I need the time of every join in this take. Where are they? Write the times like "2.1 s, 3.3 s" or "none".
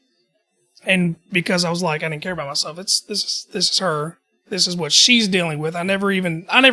none